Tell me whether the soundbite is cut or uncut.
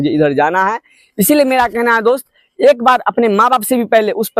uncut